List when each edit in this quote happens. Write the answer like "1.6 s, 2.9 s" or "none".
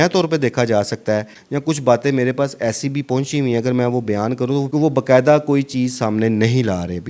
1.4 s, 4.7 s

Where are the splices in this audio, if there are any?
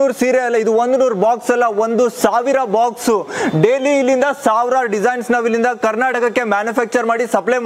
none

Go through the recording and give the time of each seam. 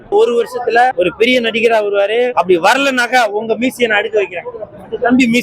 0.9 s, 2.3 s

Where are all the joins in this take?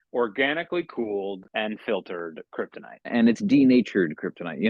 1.4 s, 3.1 s

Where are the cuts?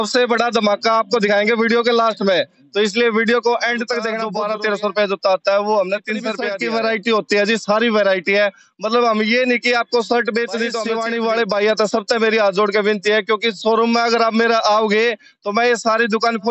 4.2 s, 6.4 s, 10.8 s

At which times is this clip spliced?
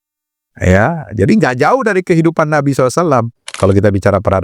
3.5 s

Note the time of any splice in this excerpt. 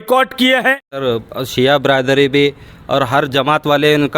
0.9 s

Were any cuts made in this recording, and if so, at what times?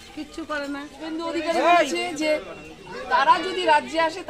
1.0 s

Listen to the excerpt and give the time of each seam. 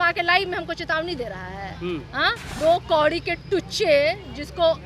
2.5 s

